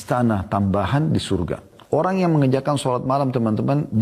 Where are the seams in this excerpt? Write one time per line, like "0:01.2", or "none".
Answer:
0:02.0